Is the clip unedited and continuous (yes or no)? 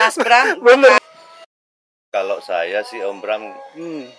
no